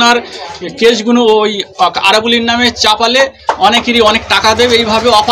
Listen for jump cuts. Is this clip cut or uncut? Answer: uncut